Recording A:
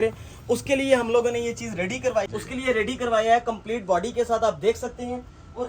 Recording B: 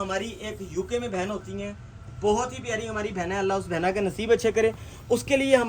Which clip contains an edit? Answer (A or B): A